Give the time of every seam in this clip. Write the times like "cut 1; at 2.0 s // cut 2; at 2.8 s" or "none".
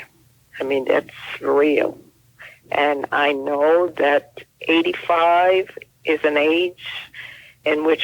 cut 1; at 5.8 s